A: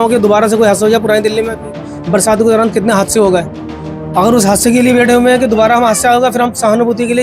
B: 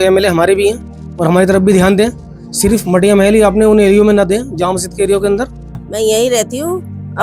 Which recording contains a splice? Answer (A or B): B